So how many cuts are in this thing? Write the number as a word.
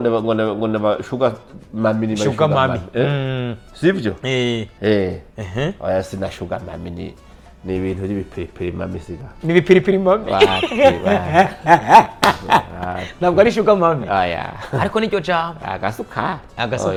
zero